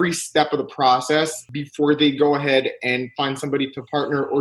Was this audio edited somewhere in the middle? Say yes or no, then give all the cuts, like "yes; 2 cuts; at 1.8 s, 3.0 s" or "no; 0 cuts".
yes; 1 cut; at 1.5 s